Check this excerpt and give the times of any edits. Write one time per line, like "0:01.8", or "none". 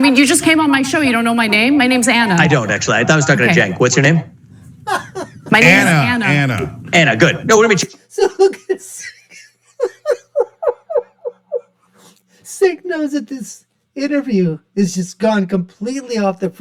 none